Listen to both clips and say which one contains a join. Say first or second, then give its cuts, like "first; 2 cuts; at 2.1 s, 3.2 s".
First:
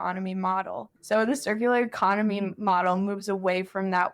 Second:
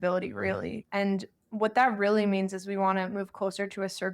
first; 1 cut; at 0.9 s